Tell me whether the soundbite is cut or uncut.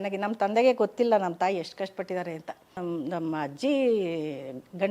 cut